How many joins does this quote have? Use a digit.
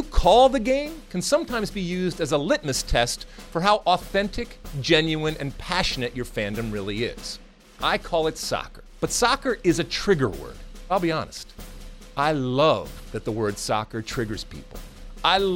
2